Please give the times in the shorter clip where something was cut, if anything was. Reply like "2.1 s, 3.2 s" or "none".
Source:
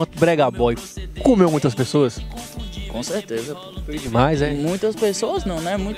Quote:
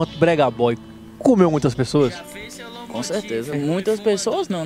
3.5 s